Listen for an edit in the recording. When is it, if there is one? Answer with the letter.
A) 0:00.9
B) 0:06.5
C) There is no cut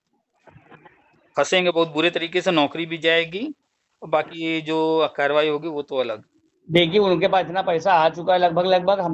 C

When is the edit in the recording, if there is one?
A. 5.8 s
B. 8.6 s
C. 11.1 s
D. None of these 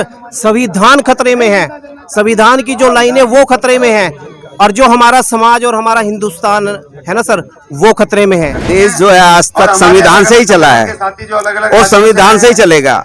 B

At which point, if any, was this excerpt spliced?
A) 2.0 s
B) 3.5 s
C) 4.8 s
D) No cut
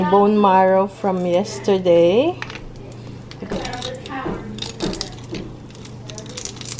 B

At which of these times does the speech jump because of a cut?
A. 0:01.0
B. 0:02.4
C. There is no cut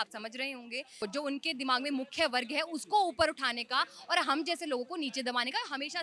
A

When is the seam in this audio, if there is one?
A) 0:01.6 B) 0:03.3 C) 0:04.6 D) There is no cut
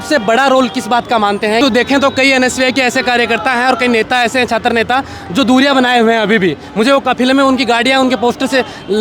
A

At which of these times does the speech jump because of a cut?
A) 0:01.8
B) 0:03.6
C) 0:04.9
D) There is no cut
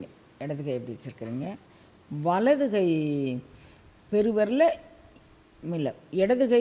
D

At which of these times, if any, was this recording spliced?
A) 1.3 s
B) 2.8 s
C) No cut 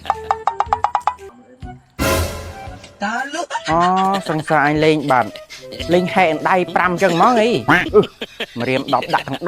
A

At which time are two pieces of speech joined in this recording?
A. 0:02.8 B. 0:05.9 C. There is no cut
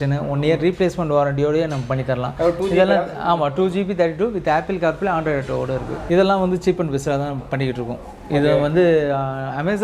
B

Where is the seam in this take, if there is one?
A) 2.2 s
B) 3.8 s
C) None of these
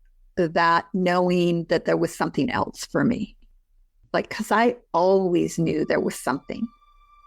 B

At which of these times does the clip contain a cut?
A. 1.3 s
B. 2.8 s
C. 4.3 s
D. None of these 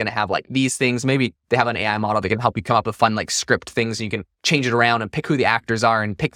D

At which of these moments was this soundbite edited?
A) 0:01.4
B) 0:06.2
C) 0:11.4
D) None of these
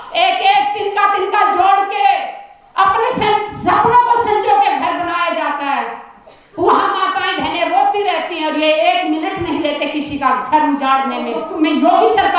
C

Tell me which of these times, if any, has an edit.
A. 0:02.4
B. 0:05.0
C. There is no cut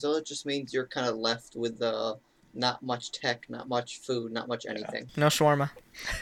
B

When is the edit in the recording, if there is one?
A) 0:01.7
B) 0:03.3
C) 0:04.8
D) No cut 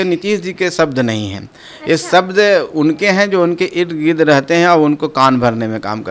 D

